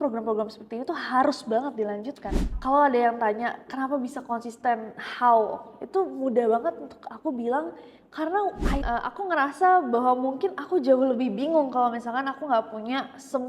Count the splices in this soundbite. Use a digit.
2